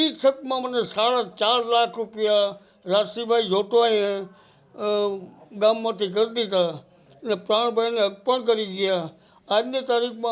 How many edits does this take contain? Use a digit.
0